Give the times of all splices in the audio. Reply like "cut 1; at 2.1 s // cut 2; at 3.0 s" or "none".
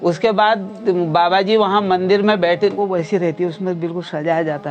cut 1; at 2.8 s